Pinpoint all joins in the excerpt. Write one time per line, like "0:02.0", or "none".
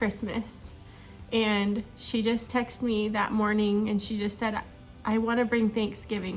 none